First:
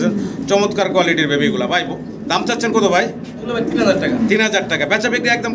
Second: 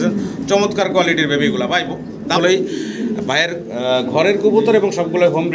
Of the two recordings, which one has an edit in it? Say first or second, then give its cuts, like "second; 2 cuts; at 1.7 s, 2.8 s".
second; 1 cut; at 2.4 s